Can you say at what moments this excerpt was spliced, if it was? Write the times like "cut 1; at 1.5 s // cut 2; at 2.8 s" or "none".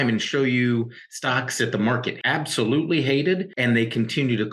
cut 1; at 2.1 s // cut 2; at 3.5 s